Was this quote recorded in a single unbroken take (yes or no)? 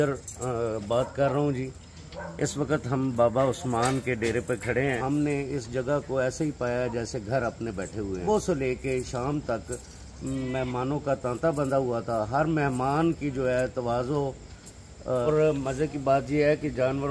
no